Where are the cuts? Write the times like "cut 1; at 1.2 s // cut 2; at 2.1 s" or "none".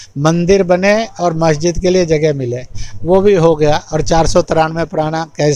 none